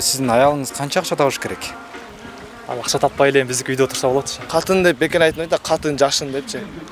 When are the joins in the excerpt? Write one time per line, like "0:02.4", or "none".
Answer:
0:04.4